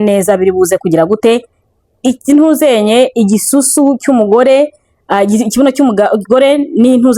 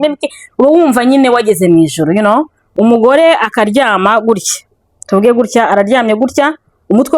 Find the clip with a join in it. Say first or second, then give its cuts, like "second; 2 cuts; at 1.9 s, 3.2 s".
second; 1 cut; at 2.6 s